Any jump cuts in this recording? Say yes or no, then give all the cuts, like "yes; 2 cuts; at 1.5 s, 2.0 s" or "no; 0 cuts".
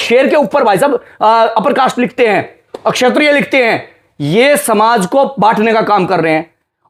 no; 0 cuts